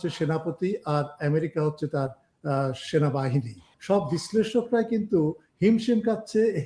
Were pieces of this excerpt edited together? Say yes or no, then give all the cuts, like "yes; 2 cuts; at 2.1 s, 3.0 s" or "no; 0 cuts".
yes; 1 cut; at 3.7 s